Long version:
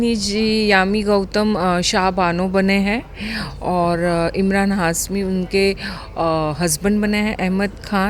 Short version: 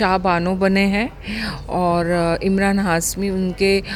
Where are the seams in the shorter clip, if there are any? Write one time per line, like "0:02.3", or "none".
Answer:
none

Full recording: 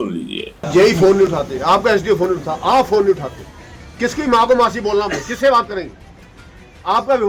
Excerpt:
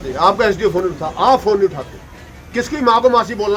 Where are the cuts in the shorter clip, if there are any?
none

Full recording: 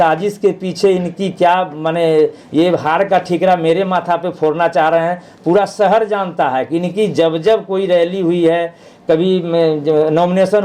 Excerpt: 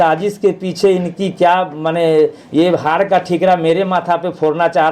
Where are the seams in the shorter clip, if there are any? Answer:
none

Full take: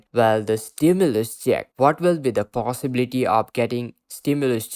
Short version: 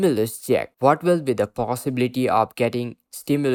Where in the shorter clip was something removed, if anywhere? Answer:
none

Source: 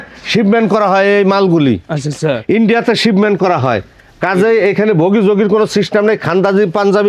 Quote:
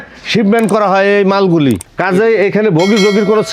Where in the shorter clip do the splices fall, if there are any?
0:01.9

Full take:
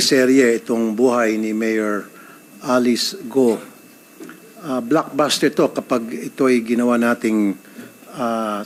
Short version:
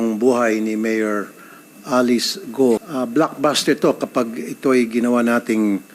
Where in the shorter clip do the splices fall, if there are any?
0:02.9

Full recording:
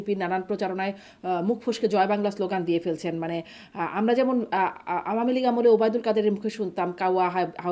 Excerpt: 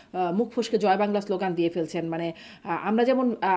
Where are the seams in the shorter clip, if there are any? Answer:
none

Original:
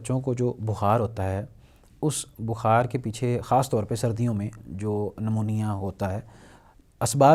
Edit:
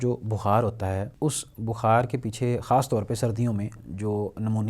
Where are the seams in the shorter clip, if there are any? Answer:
0:01.1

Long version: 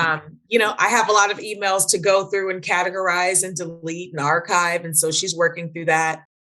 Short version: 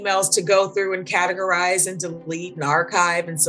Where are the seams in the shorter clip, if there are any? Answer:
none

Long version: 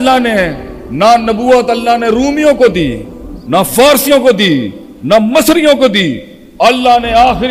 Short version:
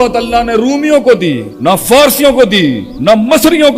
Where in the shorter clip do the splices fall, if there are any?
0:01.5
0:02.9

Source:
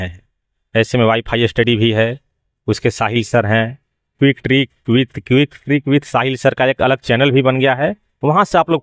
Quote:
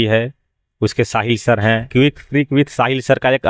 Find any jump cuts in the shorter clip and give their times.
0:01.8

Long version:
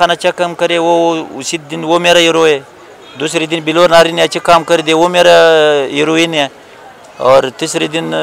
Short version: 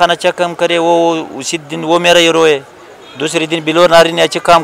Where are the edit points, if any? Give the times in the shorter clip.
none

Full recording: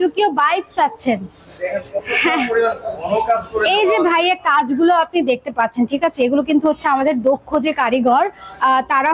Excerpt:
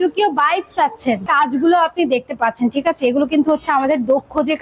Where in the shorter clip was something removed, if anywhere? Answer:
0:01.2

